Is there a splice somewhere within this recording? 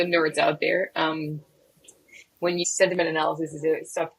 yes; 1 cut; at 2.6 s

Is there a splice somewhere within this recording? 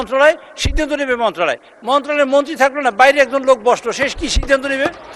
no; 0 cuts

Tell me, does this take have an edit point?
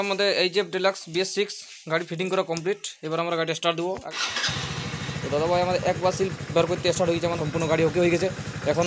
yes; 2 cuts; at 4.0 s, 7.4 s

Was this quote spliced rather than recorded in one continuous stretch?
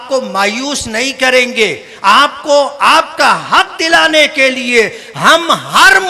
no; 0 cuts

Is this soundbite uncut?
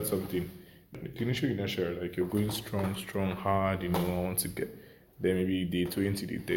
no; 1 cut; at 0.9 s

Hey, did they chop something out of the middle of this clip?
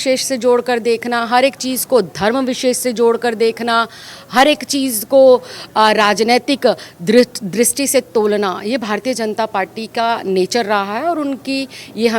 no; 0 cuts

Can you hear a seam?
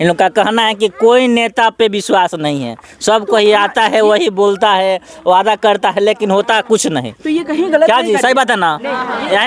no; 0 cuts

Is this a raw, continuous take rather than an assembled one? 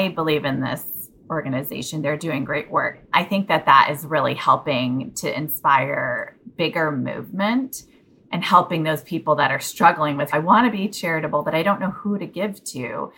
no; 2 cuts; at 2.9 s, 10.3 s

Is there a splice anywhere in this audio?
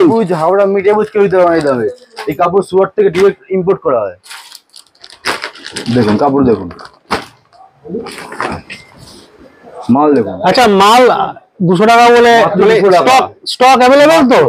no; 0 cuts

